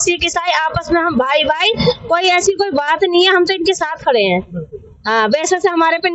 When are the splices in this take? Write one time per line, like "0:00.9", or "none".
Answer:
none